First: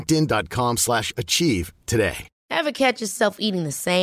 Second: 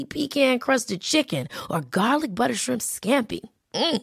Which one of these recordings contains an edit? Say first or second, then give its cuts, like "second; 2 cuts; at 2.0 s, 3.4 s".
first; 1 cut; at 2.3 s